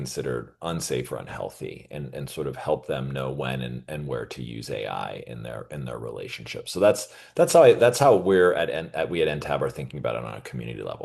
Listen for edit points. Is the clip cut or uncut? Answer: uncut